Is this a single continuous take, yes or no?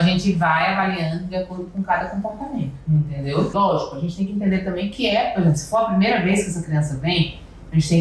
no